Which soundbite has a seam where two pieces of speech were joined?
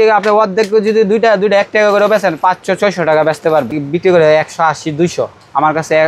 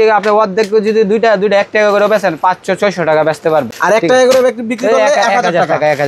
first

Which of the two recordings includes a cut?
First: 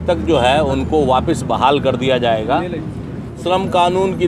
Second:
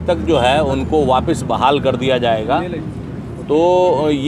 first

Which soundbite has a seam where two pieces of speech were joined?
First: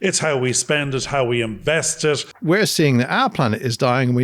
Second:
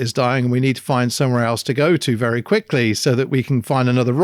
first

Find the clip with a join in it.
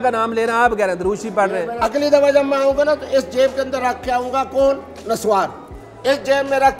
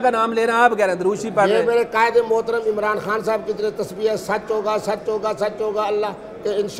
first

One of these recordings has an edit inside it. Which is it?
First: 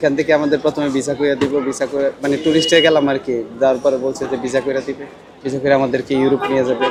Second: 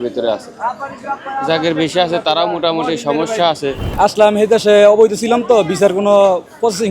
second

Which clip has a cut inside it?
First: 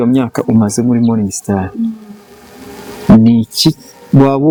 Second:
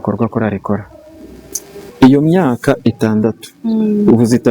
second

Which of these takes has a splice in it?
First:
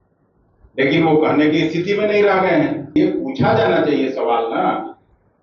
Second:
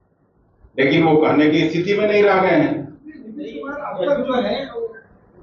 first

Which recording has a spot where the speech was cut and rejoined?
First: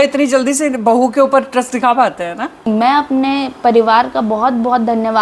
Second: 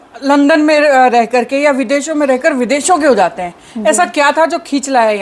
first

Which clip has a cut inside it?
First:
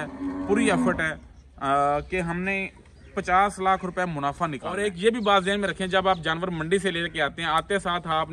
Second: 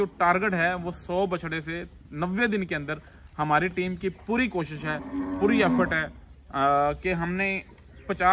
first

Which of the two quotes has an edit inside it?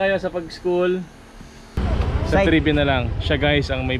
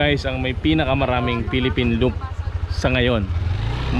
first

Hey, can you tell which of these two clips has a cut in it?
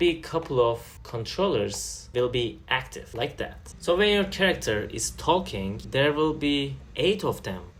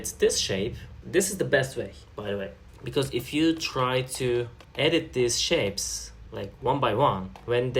second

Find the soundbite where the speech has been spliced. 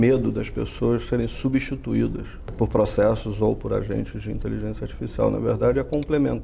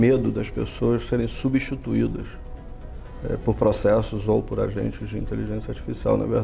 first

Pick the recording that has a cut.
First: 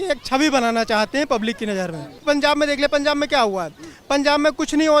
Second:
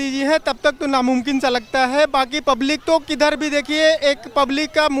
first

